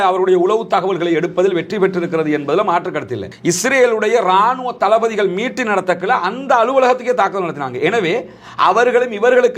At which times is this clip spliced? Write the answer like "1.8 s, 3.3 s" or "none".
3.2 s